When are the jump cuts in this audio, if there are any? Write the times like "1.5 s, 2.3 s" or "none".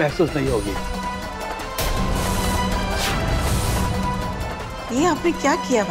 none